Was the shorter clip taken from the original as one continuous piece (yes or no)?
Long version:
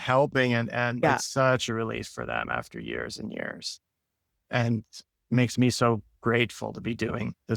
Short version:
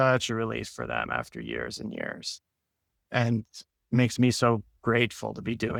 yes